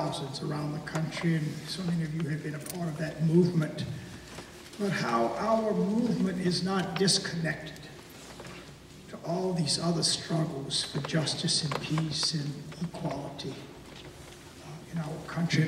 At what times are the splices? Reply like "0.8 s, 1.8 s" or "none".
8.5 s